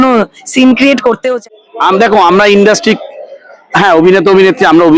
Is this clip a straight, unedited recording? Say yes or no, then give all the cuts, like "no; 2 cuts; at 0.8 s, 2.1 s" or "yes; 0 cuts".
no; 1 cut; at 1.5 s